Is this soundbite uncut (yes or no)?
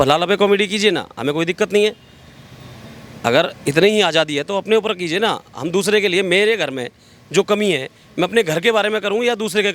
yes